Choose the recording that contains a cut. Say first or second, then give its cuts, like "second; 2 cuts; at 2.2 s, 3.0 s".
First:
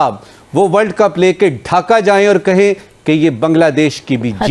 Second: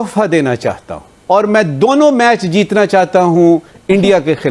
second; 1 cut; at 1.1 s